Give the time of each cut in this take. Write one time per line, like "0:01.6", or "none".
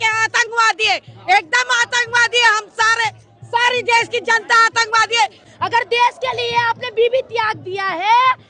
0:05.4